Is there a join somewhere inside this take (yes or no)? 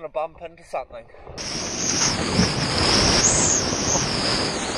yes